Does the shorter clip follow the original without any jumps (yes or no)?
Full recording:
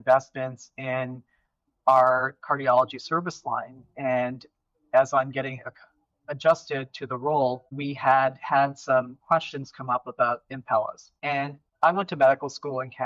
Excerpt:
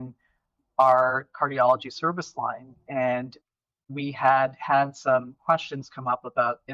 no